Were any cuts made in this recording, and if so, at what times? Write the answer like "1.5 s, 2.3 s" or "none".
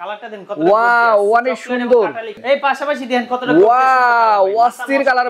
2.4 s